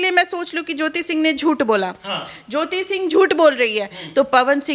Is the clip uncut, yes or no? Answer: yes